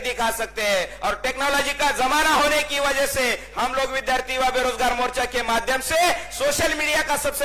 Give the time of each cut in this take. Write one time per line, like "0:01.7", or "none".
none